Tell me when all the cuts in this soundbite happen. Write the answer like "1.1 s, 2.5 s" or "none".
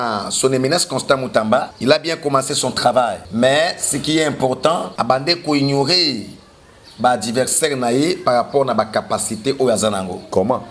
1.7 s, 3.2 s, 4.9 s